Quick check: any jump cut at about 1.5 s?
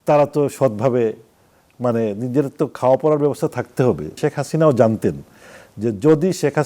no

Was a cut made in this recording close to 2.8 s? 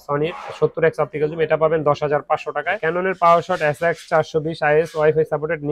yes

